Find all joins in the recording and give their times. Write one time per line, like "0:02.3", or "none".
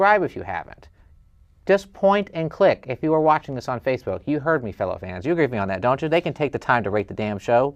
none